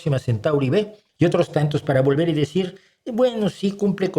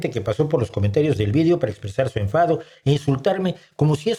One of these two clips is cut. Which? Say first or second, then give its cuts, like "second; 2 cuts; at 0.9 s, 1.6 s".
first; 1 cut; at 1.0 s